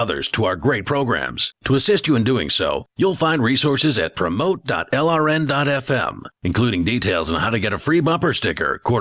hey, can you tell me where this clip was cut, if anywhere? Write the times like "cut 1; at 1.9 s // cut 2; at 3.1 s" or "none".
none